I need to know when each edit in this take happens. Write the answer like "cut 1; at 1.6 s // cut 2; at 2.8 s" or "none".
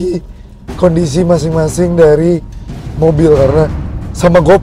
none